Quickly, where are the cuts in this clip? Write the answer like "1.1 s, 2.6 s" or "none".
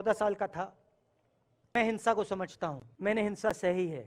1.8 s, 2.9 s

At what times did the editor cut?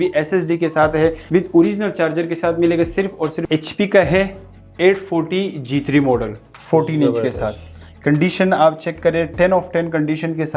1.2 s, 3.5 s

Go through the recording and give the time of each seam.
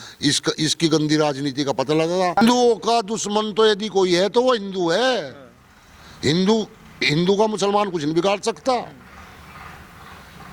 2.4 s

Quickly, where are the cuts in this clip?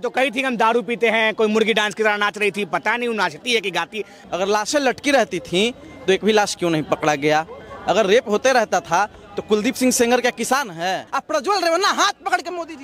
4.2 s, 11.1 s

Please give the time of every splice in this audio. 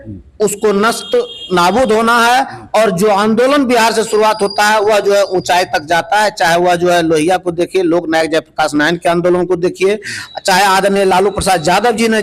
none

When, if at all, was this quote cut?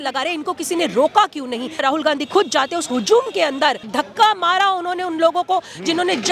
1.8 s, 3.9 s

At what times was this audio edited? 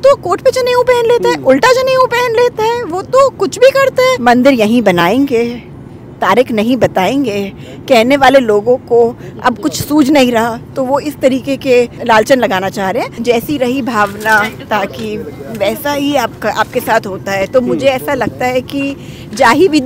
4.2 s, 12.0 s, 13.2 s

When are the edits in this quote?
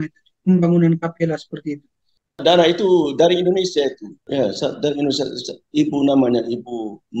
2.4 s, 4.1 s

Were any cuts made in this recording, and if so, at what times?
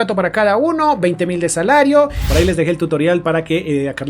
2.1 s

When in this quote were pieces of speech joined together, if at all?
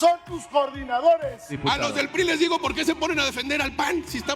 1.6 s

